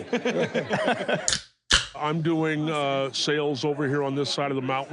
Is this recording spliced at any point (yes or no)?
yes